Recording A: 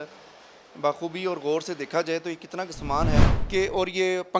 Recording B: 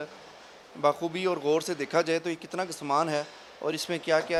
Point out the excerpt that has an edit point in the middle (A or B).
A